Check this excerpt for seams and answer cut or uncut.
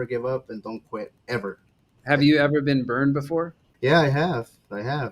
cut